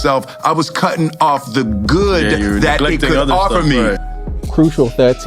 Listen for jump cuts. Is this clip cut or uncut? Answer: cut